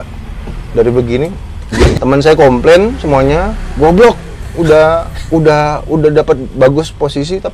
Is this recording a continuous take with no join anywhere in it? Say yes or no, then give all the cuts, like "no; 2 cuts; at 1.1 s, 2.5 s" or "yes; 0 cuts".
no; 1 cut; at 2.0 s